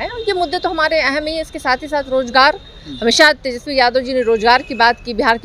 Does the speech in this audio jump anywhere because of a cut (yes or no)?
no